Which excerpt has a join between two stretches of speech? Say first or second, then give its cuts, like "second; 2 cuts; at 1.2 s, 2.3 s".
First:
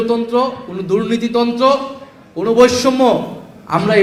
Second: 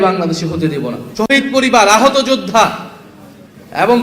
second; 1 cut; at 1.0 s